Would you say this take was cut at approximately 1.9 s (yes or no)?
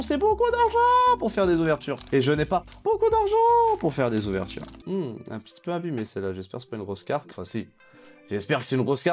yes